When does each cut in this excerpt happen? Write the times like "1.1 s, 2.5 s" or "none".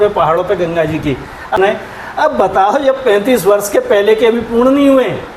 1.5 s